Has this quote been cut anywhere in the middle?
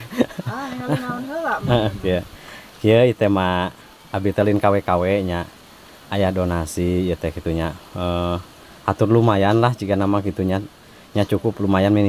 no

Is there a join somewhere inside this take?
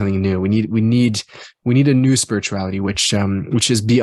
no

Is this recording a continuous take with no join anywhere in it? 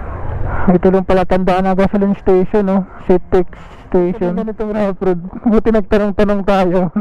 no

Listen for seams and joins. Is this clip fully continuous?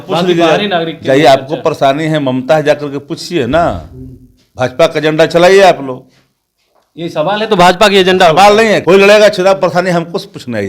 no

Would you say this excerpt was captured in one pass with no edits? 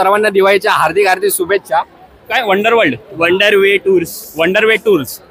no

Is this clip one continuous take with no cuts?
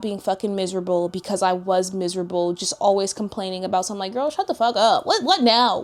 yes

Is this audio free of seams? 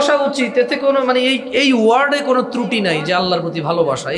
yes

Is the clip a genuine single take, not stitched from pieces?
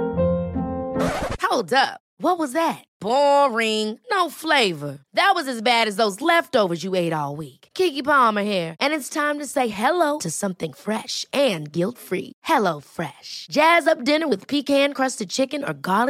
yes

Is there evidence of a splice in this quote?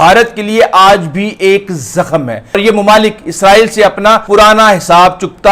yes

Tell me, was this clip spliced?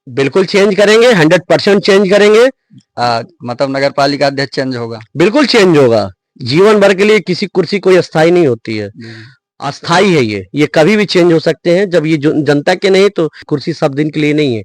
yes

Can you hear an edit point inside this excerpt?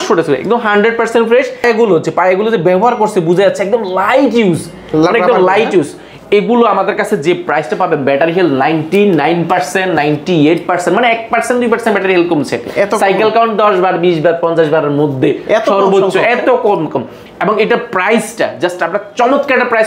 no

